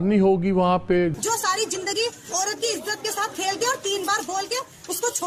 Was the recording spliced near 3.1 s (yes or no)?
no